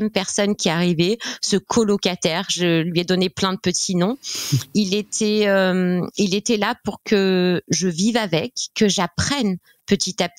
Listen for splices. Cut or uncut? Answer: uncut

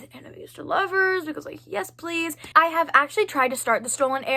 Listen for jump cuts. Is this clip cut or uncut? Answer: uncut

